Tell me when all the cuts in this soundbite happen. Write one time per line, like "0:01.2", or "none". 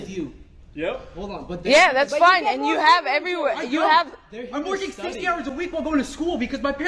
0:02.8